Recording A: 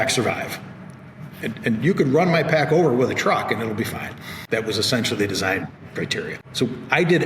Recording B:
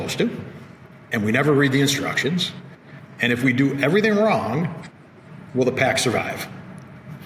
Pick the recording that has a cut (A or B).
A